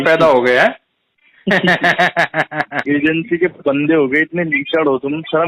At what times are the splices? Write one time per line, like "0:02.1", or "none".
0:02.7